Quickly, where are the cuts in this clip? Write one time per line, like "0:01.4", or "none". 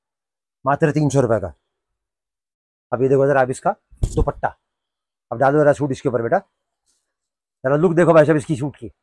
none

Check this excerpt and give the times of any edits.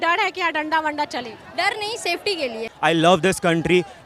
0:02.7

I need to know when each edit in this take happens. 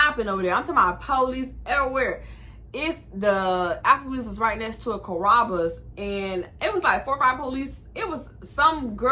none

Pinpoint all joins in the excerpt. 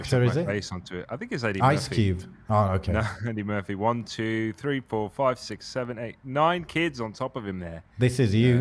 none

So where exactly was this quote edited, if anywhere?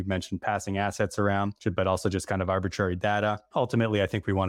0:01.5
0:03.4

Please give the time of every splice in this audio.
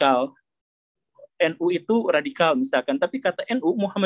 0:01.2

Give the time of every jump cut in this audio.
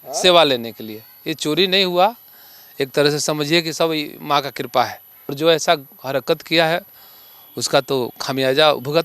0:05.3

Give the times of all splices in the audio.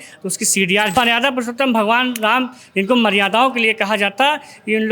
0:00.9

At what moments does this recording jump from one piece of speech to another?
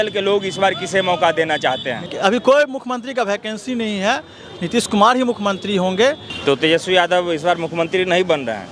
0:02.1
0:06.3

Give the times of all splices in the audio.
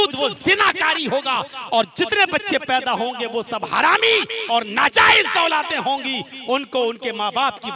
none

